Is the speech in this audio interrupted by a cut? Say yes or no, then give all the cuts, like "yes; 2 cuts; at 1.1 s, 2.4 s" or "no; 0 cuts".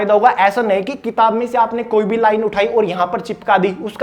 no; 0 cuts